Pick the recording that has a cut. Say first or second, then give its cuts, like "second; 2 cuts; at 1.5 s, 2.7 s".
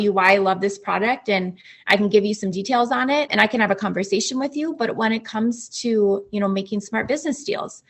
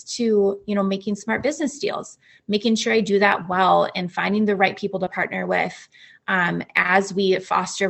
first; 1 cut; at 3.3 s